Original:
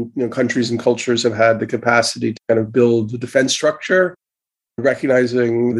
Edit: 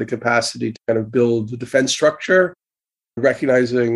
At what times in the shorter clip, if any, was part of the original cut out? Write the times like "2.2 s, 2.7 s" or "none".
none

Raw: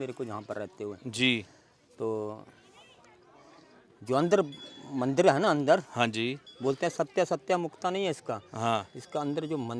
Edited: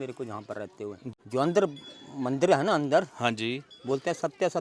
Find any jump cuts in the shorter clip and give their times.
1.1 s

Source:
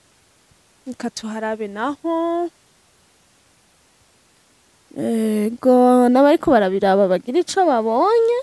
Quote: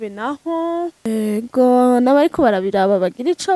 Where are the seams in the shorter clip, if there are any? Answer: 1.1 s

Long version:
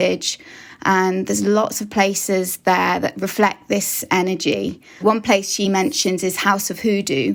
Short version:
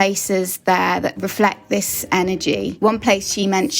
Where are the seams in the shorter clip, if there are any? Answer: 2.7 s

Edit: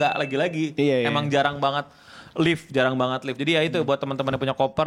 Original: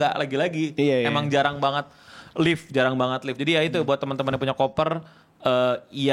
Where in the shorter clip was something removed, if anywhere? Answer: none

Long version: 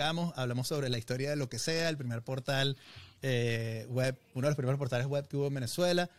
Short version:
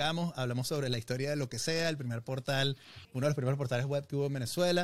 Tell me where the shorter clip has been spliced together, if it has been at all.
3.1 s

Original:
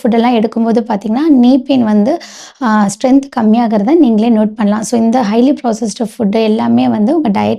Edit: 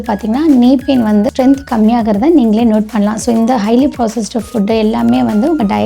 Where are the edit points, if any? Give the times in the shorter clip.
1.3 s

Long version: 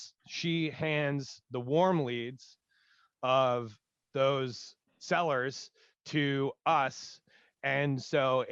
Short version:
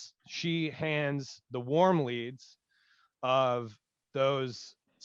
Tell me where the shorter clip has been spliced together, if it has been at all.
none

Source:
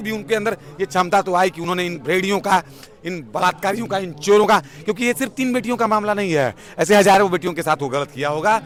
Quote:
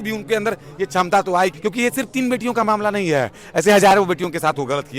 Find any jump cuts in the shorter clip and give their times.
1.6 s

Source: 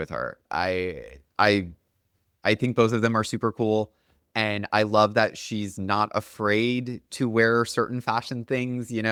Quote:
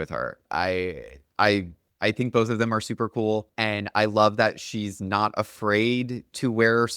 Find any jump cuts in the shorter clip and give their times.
1.8 s, 3.5 s

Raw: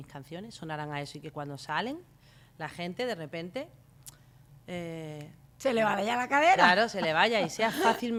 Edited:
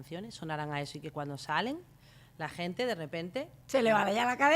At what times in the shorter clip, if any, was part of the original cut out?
3.6 s

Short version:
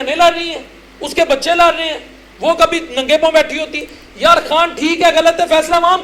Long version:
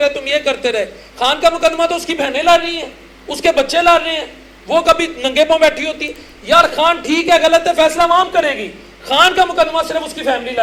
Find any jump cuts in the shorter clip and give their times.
none

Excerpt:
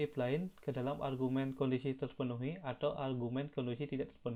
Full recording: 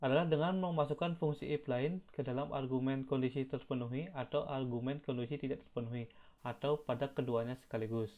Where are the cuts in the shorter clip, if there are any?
none

